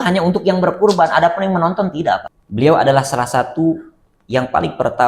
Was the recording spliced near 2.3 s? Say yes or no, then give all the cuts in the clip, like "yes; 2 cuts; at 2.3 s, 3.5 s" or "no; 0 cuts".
yes; 1 cut; at 2.3 s